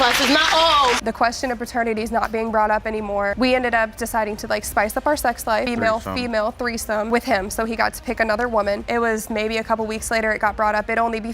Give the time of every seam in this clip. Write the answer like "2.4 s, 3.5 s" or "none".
1.0 s, 5.7 s, 8.8 s